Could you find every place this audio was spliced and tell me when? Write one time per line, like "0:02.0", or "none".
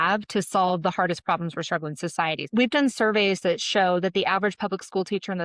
0:02.5